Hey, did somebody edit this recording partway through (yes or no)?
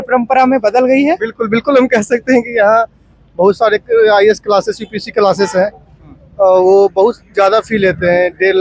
no